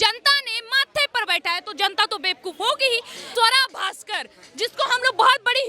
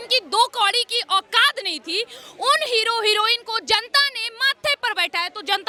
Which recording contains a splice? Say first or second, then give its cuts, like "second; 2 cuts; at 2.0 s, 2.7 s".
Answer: first; 1 cut; at 3.2 s